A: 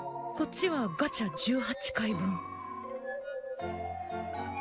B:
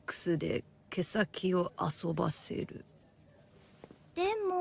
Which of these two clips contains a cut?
A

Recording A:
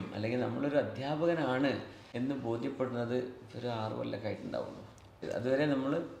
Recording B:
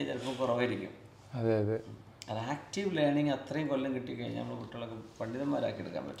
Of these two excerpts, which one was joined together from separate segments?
A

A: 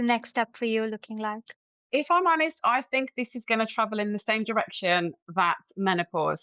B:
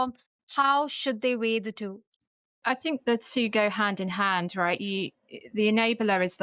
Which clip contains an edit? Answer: A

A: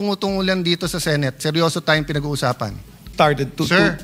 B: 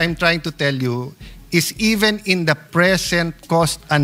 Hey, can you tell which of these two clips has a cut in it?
A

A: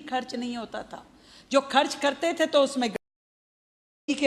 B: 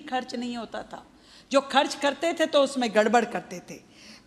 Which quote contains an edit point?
B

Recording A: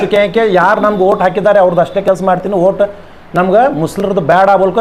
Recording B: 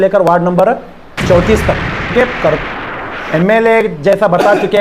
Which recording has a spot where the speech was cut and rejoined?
B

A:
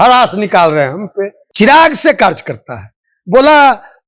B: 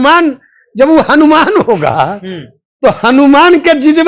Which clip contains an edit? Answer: A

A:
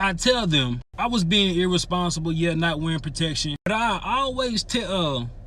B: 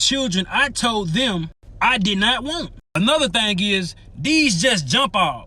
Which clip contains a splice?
B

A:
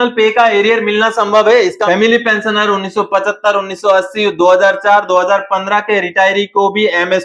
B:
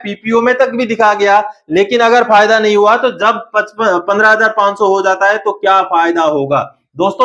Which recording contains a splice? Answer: A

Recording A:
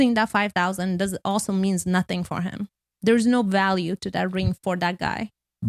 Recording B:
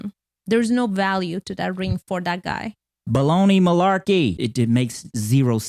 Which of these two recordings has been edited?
B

